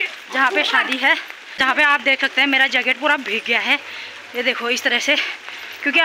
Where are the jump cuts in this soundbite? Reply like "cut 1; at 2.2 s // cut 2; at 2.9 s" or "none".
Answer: cut 1; at 1.8 s